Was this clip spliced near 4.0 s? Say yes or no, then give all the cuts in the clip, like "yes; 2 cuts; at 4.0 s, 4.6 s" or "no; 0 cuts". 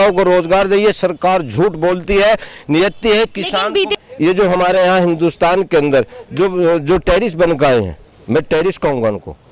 yes; 1 cut; at 4.0 s